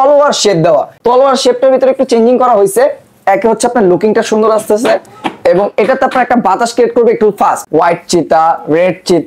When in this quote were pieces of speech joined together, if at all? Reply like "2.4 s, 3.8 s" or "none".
0.9 s, 7.6 s